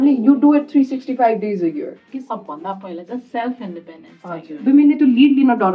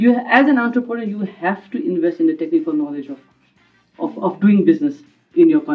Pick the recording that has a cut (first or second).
first